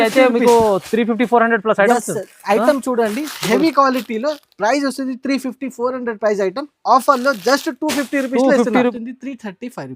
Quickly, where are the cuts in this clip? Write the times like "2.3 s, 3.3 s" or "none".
8.9 s